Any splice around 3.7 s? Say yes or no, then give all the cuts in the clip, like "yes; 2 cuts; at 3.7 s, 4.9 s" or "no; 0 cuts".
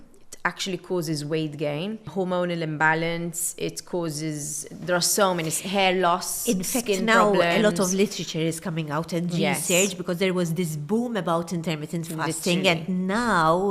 no; 1 cut; at 2.1 s